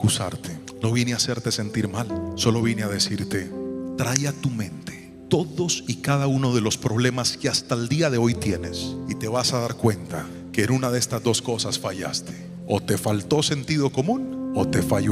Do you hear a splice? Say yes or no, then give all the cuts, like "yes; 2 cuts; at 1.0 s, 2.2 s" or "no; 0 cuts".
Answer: no; 0 cuts